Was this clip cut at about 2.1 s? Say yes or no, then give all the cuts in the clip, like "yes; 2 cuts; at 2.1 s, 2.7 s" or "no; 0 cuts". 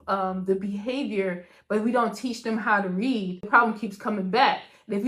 no; 1 cut; at 3.5 s